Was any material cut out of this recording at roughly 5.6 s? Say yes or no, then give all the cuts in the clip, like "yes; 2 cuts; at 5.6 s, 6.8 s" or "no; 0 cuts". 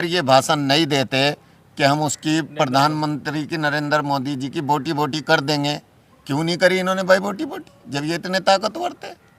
no; 0 cuts